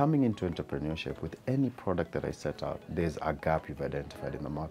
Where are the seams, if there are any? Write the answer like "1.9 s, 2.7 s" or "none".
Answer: 2.8 s